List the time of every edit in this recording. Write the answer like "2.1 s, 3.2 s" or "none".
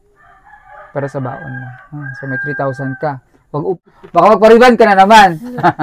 3.8 s